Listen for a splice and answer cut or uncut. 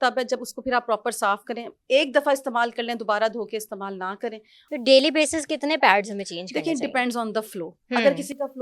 cut